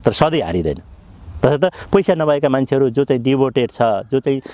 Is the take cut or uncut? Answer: uncut